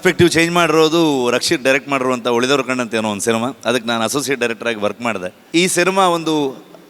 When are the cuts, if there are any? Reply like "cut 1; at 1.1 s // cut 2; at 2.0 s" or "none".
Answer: cut 1; at 5.3 s